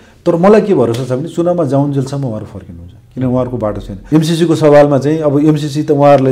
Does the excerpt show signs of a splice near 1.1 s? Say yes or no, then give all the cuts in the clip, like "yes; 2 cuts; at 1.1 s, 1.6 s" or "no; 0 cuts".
no; 1 cut; at 3.9 s